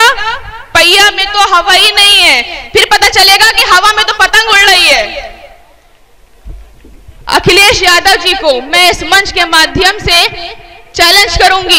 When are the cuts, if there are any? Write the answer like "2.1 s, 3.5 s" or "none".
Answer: 5.9 s